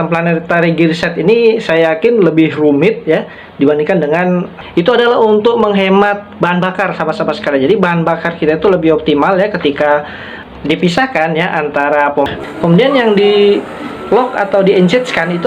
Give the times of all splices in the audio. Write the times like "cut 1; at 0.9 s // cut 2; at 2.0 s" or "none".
cut 1; at 4.5 s // cut 2; at 12.3 s